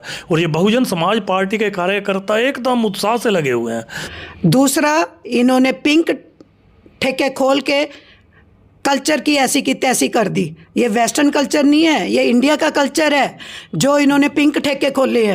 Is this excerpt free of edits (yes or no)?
no